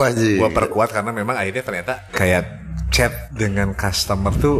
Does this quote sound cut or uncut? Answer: cut